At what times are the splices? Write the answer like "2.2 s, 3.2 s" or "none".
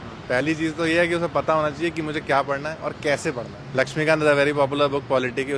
3.5 s